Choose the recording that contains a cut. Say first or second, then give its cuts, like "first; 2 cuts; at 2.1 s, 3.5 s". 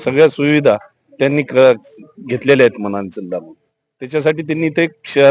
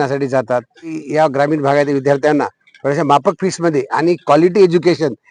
second; 1 cut; at 1.0 s